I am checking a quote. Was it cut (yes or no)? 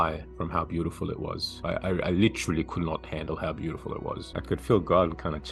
yes